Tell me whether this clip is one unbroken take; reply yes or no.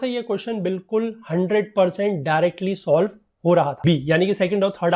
no